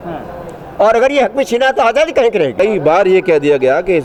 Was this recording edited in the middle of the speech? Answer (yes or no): no